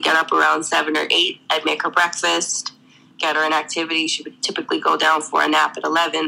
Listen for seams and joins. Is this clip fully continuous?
yes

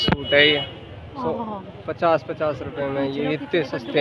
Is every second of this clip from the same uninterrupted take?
yes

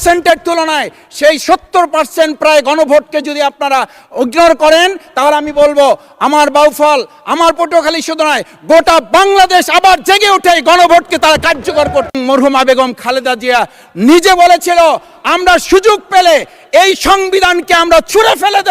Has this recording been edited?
yes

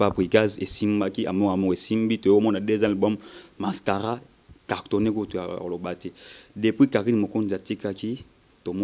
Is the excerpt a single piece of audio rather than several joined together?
yes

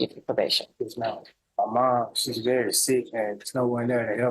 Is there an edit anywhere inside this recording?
yes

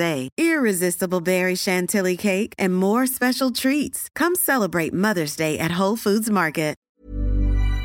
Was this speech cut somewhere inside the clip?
yes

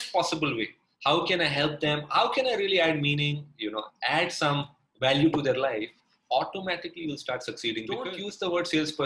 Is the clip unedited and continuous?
no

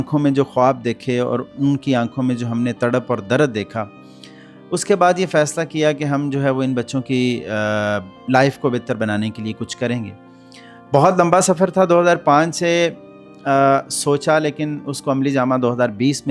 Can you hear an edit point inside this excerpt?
no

